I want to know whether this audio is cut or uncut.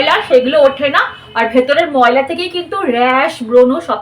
uncut